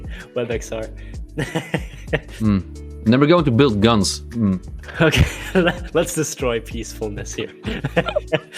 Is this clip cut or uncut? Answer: cut